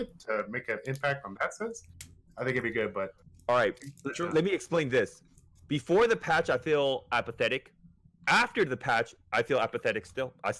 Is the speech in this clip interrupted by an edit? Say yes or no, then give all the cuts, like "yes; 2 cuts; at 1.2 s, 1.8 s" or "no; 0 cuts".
no; 0 cuts